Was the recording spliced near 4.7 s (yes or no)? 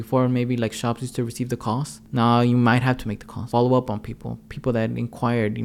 no